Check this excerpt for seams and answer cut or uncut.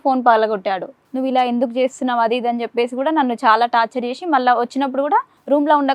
cut